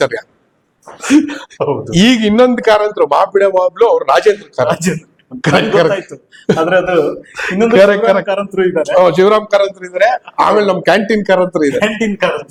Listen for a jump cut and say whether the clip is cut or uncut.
uncut